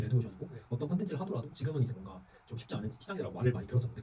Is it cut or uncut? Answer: uncut